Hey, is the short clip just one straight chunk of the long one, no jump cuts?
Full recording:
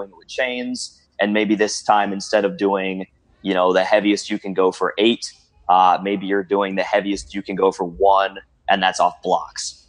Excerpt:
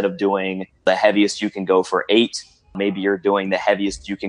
no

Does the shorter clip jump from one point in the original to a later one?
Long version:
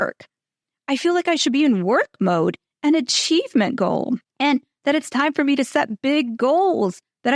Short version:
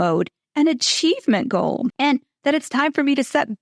yes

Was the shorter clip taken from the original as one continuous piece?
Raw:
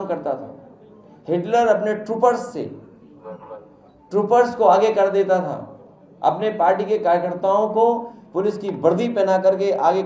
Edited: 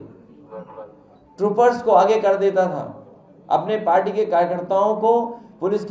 yes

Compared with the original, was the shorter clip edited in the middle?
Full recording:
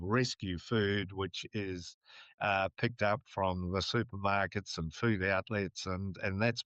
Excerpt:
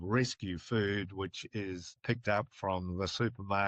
yes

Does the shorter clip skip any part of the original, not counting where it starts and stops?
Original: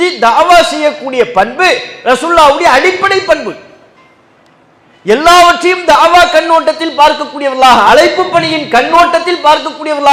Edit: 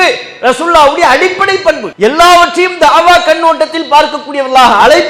yes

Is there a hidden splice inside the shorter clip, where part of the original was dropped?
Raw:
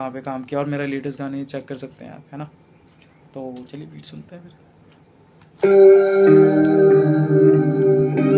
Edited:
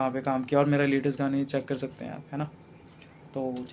no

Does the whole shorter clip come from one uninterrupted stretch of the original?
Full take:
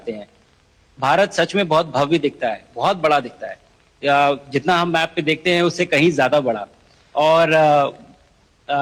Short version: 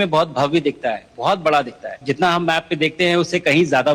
no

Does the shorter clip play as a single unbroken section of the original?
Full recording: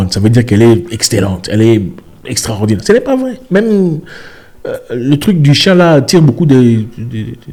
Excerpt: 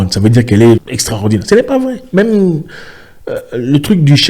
no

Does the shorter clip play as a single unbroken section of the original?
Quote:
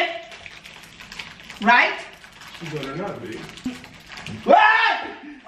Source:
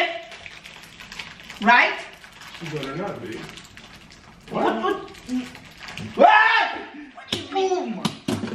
no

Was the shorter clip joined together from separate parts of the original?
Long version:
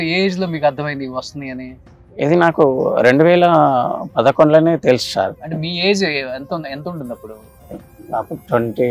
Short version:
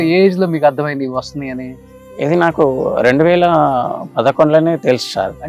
no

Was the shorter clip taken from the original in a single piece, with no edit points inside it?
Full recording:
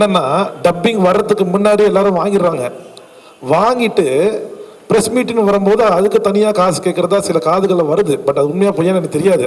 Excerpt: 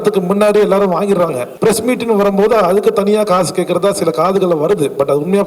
no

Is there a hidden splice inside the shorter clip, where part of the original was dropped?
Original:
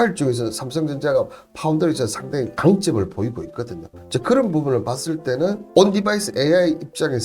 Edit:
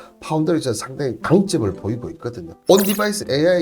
yes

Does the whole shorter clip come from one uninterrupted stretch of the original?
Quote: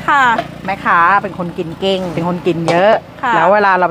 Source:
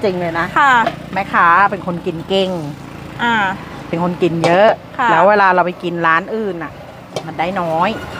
no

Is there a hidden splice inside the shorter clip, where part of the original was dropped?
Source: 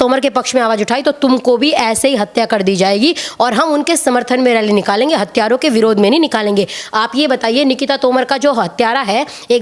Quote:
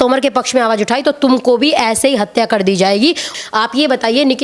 yes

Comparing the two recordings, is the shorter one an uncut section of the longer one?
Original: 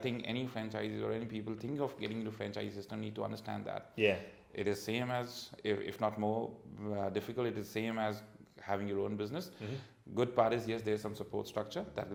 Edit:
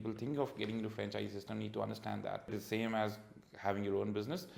no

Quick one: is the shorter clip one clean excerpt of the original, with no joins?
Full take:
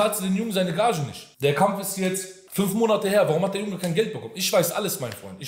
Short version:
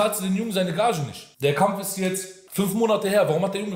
yes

